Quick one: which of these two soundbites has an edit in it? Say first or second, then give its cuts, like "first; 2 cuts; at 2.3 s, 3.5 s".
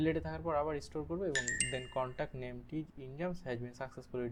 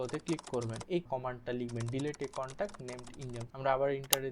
second; 2 cuts; at 1.0 s, 3.5 s